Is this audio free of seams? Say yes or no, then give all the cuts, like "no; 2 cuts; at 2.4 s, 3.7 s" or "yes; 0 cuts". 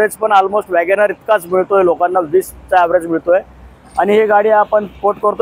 yes; 0 cuts